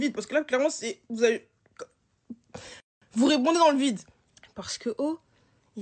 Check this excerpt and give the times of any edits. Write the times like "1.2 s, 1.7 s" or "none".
4.2 s